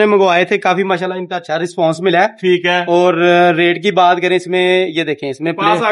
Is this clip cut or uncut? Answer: uncut